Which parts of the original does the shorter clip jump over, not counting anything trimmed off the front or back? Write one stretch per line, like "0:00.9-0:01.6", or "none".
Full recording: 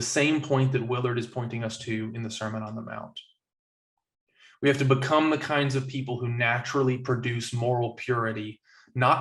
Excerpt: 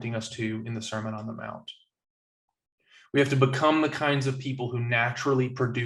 none